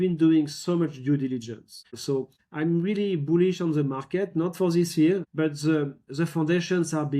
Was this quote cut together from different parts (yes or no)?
yes